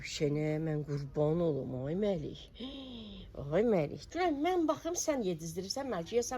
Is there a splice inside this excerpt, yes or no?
yes